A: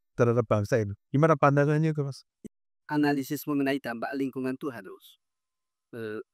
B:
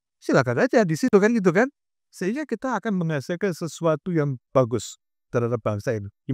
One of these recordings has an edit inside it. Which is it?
A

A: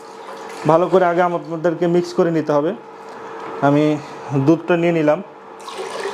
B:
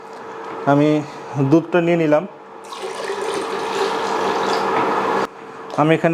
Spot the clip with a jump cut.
B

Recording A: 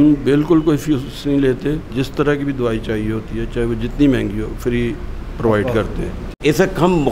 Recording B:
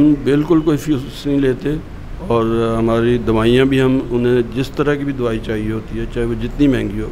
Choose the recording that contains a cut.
A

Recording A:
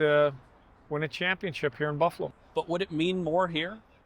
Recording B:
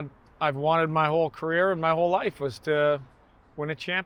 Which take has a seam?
A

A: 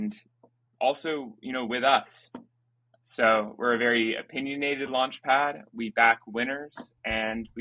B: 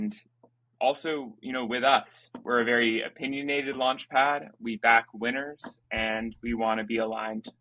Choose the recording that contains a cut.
B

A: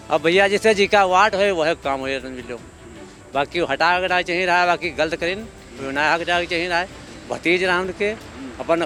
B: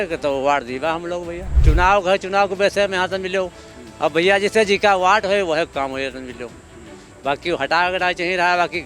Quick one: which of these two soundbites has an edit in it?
B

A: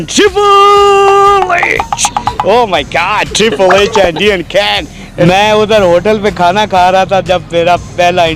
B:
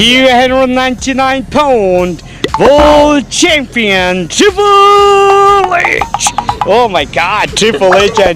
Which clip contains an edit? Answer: A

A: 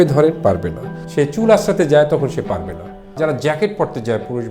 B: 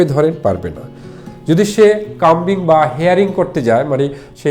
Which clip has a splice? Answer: A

